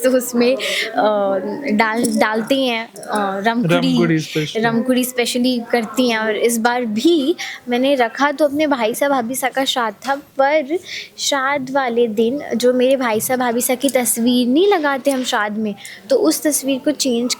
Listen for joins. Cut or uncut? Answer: uncut